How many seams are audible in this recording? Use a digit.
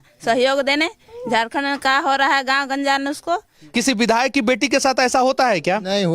1